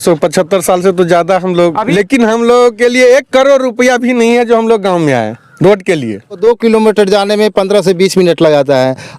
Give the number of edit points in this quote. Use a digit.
2